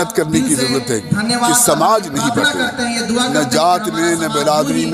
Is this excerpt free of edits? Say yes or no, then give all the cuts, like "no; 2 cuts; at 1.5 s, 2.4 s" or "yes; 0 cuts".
yes; 0 cuts